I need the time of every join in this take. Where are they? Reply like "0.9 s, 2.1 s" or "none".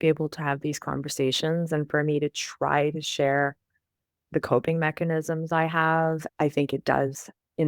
6.3 s